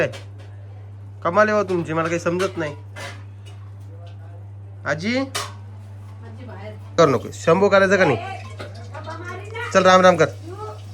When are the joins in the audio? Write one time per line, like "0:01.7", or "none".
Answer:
0:07.0